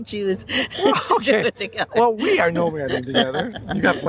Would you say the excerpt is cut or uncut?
uncut